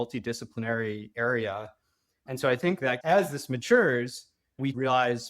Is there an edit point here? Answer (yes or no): yes